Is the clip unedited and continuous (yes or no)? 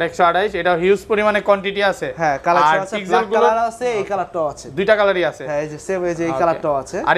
yes